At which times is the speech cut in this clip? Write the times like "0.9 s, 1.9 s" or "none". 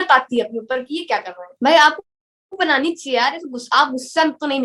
1.5 s

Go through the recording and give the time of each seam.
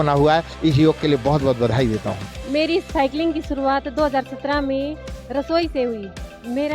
2.3 s

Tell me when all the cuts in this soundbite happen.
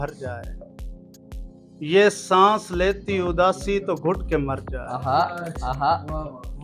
none

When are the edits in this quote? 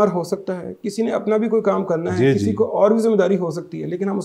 none

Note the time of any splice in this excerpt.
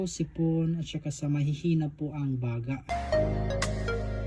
2.8 s

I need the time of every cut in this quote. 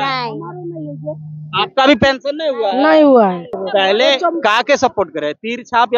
3.5 s

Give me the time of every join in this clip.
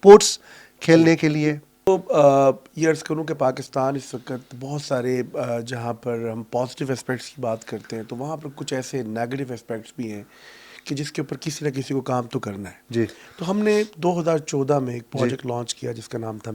1.9 s

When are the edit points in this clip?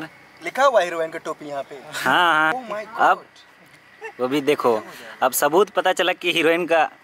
2.5 s

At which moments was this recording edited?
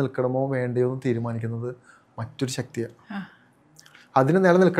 none

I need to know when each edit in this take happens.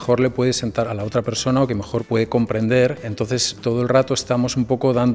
0.8 s, 2.0 s, 3.5 s

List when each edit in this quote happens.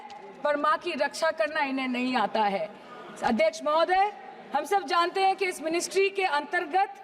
none

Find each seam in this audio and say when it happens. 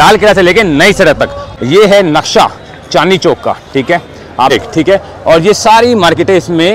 1.4 s, 4.5 s

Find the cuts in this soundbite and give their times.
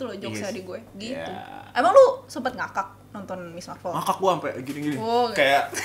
none

